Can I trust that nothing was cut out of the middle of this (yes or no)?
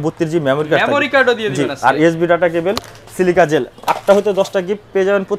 yes